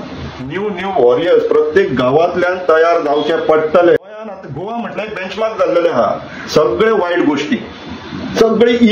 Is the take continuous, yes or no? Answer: no